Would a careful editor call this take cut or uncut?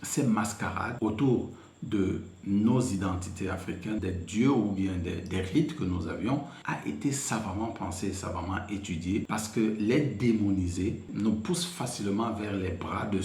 cut